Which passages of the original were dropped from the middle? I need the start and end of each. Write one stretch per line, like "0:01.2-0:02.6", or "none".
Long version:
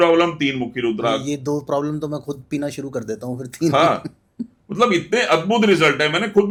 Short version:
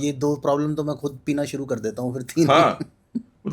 none

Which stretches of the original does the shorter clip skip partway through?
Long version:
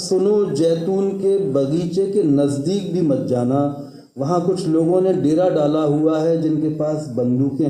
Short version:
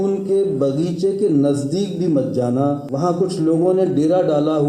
0:03.8-0:04.1

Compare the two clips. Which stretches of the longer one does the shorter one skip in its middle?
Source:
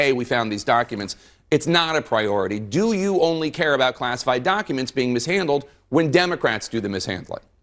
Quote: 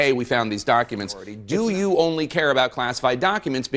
0:01.3-0:02.6

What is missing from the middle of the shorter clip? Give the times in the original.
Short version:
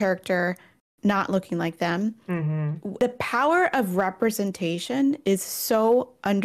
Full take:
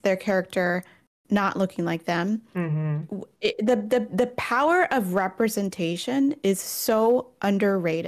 0:03.2-0:04.1

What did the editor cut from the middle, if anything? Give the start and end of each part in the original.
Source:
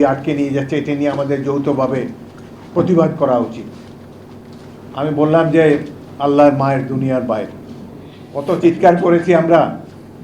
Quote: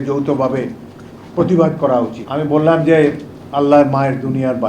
0:03.6-0:04.9

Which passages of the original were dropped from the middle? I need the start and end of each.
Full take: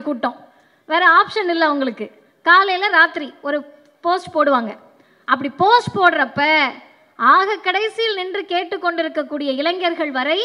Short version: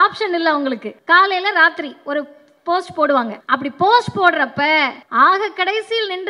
0:02.1-0:02.3
0:04.7-0:05.2
0:06.8-0:07.1

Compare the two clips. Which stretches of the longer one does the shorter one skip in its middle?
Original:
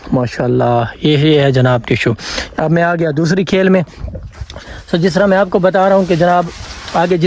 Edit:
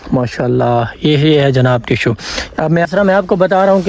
0:02.9-0:05.1

